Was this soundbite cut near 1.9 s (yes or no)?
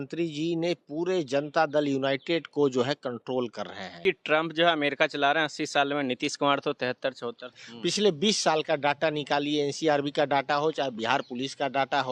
no